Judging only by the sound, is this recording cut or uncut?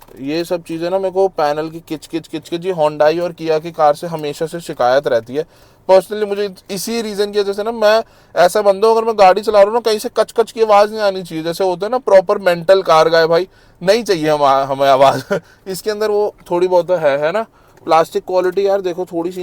uncut